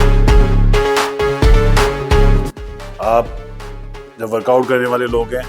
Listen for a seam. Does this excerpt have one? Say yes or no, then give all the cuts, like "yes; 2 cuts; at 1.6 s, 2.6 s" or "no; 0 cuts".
yes; 1 cut; at 2.5 s